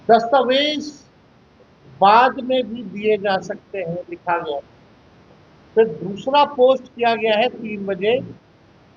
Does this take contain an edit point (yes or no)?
no